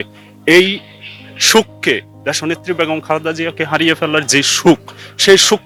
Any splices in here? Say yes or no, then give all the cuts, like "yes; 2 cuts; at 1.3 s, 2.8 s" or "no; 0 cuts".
no; 0 cuts